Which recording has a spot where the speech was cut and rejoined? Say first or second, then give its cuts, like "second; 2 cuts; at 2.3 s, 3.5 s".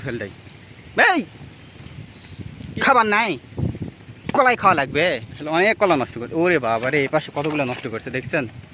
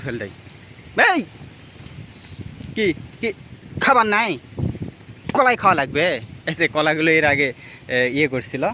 first; 2 cuts; at 2.6 s, 5.3 s